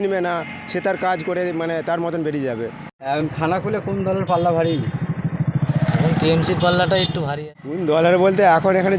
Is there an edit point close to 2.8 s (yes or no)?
yes